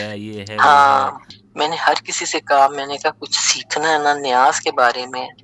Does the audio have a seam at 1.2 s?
yes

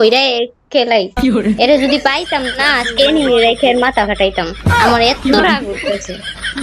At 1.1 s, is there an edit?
yes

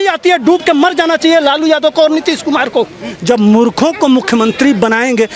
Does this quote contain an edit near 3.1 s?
yes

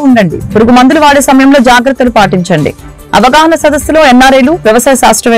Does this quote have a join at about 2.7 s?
no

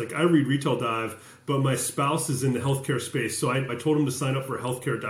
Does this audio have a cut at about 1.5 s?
no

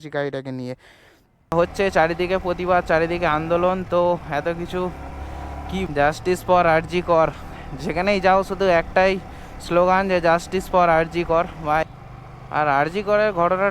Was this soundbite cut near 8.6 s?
no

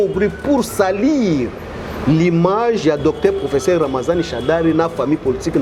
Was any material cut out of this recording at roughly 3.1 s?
no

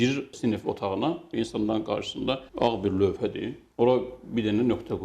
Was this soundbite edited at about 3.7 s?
no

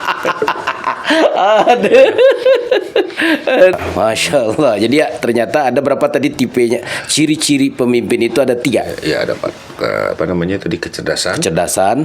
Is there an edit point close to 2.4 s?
no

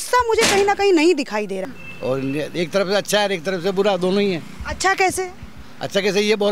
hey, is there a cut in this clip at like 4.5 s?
no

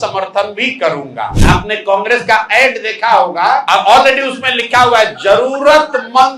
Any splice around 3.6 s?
yes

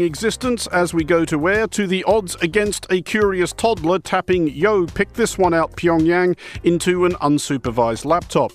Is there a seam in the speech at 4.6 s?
yes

